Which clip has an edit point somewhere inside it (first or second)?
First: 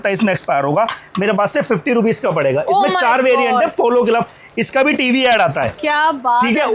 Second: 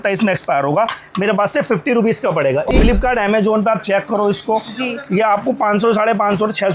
second